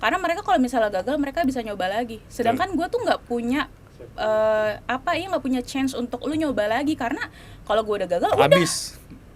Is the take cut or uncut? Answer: uncut